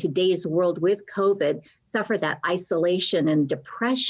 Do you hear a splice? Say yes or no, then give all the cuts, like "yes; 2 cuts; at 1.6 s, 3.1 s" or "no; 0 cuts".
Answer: no; 0 cuts